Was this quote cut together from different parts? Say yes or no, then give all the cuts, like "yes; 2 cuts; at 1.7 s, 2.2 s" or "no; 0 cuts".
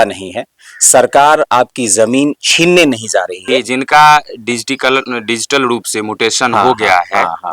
yes; 1 cut; at 3.6 s